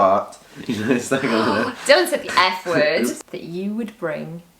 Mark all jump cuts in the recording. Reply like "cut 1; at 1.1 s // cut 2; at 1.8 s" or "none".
cut 1; at 3.1 s